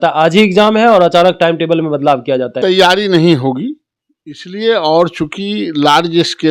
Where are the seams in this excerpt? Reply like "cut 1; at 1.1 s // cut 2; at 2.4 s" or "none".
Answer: cut 1; at 2.5 s